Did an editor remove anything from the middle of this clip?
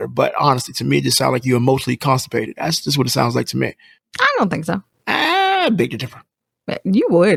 no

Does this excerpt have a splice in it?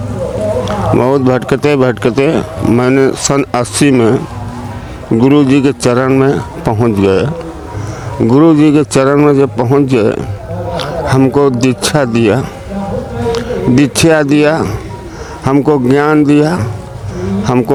no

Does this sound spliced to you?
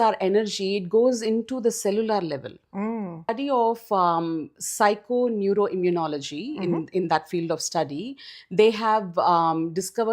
yes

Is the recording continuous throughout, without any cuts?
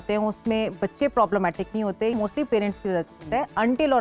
no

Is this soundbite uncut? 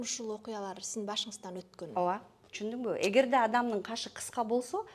no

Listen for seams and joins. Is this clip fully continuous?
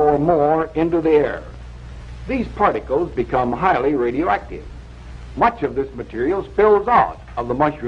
yes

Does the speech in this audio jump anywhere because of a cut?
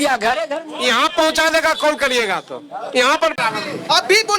yes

